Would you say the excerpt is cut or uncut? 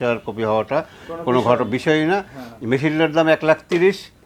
uncut